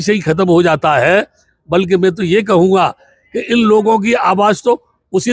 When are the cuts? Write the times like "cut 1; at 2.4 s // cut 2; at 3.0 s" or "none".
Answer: none